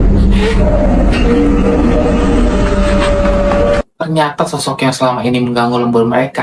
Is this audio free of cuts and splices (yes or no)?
yes